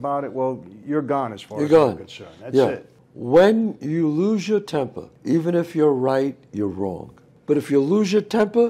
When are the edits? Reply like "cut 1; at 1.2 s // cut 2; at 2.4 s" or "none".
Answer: cut 1; at 2.9 s // cut 2; at 7.3 s